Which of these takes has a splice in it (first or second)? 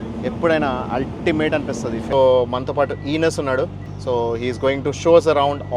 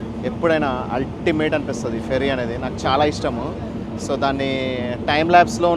first